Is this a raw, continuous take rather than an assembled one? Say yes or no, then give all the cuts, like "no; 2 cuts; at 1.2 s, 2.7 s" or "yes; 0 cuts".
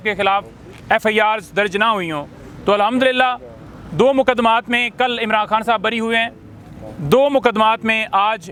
yes; 0 cuts